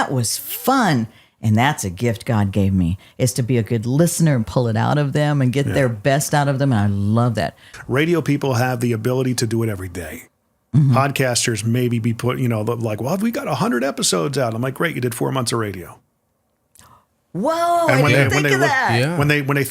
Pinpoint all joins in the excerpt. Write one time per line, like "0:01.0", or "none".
0:07.7